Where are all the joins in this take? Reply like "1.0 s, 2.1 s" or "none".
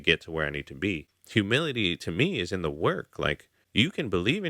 1.1 s, 3.5 s